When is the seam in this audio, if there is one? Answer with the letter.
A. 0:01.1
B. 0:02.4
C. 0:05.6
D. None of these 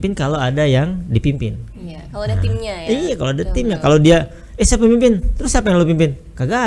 D